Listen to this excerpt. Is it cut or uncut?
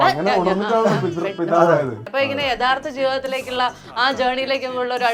cut